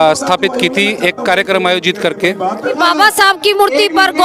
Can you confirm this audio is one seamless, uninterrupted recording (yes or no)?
no